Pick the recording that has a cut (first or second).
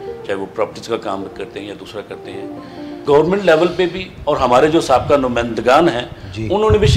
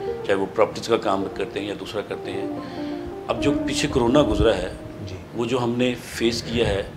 first